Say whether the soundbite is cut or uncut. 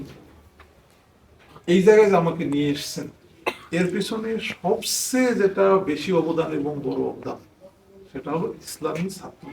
uncut